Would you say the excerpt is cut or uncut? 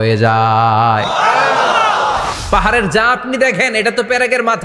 cut